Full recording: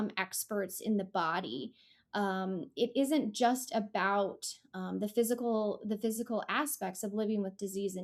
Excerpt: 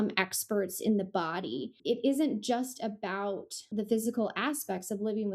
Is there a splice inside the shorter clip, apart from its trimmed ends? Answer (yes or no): yes